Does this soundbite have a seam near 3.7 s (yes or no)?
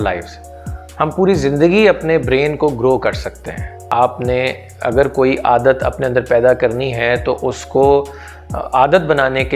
yes